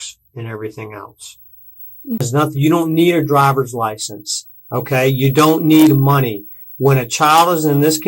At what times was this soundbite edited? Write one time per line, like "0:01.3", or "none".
0:02.2